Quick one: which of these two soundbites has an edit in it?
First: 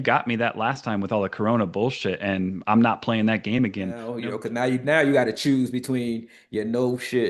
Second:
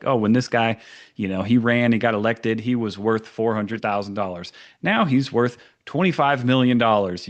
first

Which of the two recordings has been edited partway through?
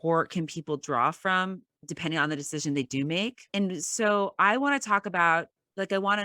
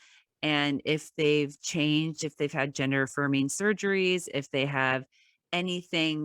first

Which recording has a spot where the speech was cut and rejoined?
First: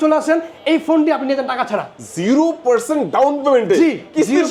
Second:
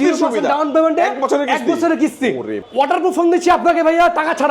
second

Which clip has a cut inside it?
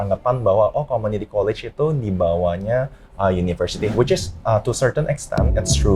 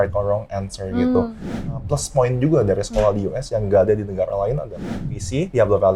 second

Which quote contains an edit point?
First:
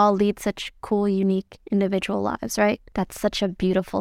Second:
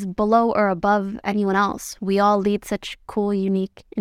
first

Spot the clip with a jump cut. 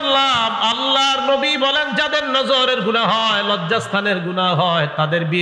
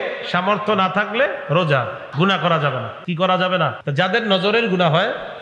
second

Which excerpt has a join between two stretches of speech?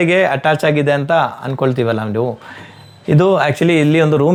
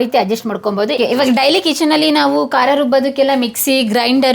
second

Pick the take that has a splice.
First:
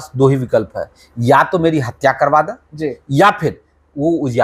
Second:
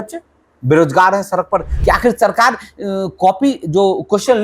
second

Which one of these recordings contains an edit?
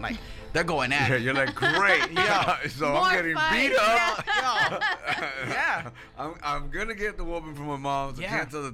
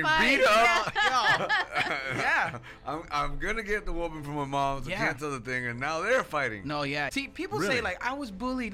second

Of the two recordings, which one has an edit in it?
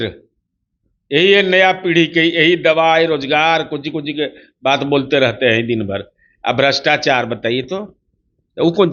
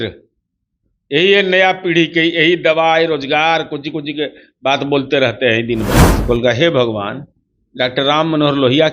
second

